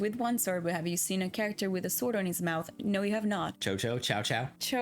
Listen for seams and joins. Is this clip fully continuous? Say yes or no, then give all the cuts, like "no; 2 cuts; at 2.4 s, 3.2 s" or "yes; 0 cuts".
no; 1 cut; at 3.6 s